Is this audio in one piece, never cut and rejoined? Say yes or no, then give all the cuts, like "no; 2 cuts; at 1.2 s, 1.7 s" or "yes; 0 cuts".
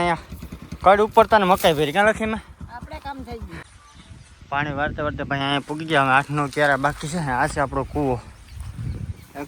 no; 1 cut; at 3.6 s